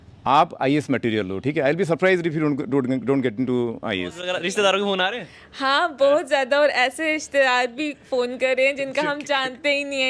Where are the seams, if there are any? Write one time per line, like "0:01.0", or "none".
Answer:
0:04.4